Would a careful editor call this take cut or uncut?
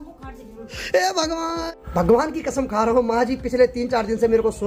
uncut